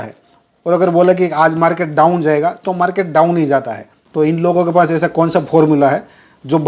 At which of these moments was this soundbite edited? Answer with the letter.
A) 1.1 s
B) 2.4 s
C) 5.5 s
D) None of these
D